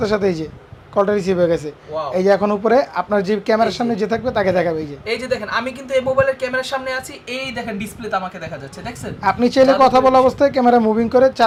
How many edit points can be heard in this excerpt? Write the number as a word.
zero